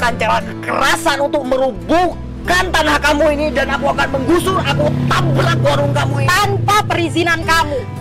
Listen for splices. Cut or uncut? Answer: uncut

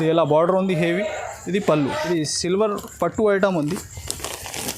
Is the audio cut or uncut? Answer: cut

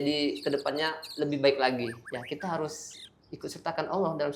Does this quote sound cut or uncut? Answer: uncut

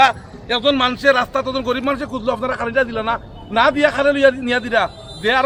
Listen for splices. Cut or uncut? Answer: uncut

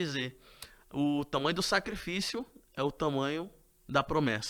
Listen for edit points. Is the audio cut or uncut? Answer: uncut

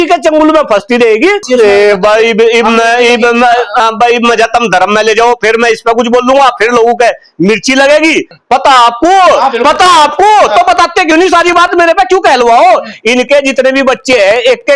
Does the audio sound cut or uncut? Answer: cut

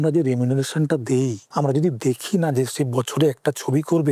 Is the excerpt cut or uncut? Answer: cut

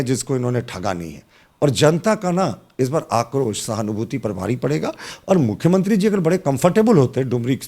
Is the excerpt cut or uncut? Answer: uncut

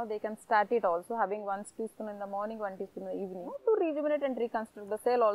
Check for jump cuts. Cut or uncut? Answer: cut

